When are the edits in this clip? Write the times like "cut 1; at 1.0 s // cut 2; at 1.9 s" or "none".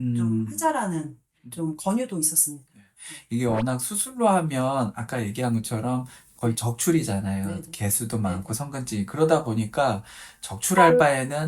none

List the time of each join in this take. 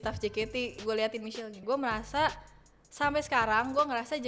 cut 1; at 1.6 s

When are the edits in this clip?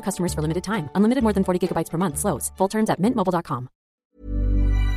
cut 1; at 4.0 s

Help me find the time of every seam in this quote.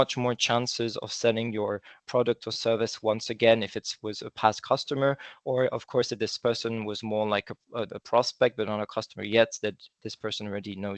none

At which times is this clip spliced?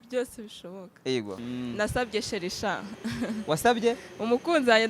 cut 1; at 1.4 s

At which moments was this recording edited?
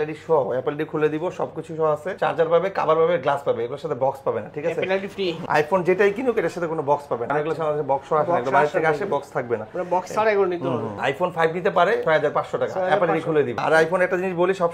none

